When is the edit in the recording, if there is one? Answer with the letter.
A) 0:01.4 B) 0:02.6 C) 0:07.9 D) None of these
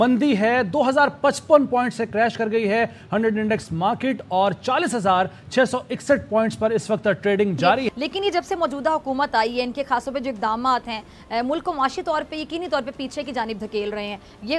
C